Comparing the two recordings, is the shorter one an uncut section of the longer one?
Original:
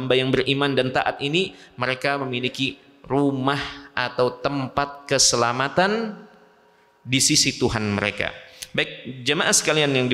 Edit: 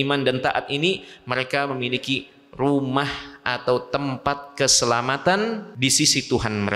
no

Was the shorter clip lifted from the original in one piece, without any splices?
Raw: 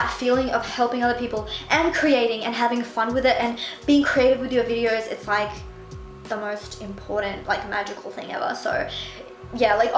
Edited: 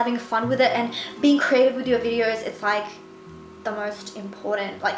yes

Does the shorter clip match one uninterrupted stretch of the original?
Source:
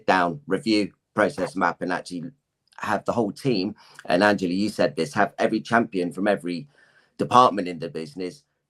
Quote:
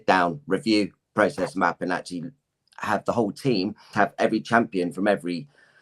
no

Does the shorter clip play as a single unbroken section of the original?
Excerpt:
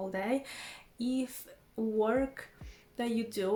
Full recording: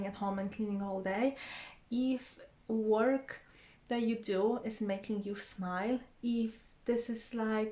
yes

